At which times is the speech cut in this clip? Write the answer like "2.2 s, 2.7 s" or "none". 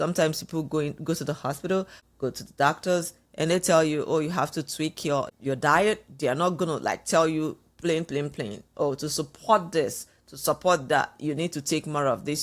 2.0 s, 5.3 s